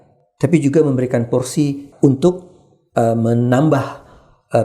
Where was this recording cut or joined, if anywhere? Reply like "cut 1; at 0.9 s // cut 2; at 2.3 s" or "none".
cut 1; at 1.8 s